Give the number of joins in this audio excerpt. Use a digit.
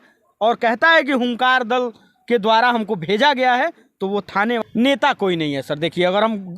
1